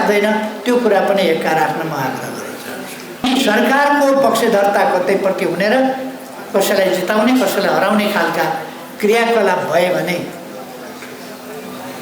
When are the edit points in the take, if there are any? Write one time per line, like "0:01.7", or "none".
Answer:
0:03.2

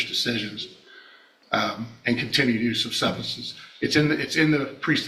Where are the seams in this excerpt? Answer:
none

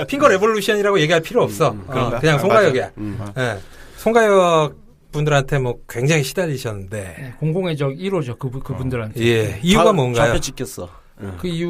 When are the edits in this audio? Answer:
0:05.6

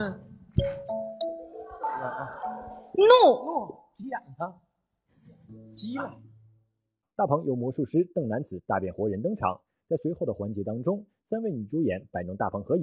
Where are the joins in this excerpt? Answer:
0:10.0

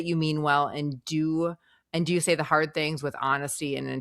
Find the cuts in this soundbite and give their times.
none

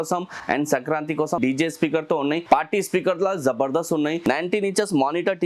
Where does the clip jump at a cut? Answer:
0:01.4
0:02.4
0:04.2

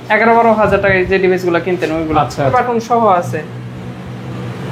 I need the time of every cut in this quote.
0:02.5

